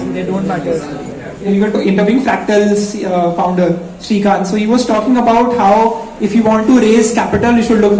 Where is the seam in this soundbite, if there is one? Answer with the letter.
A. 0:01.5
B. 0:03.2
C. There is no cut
A